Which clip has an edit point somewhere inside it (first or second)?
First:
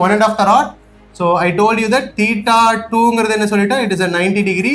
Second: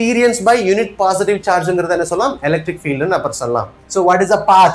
second